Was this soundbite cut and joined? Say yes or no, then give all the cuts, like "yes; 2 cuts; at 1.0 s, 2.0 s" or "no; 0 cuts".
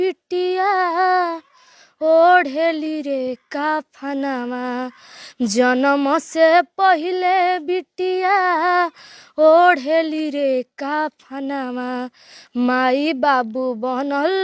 no; 0 cuts